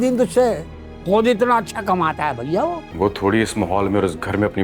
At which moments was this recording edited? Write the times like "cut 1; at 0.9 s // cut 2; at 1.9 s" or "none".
cut 1; at 2.9 s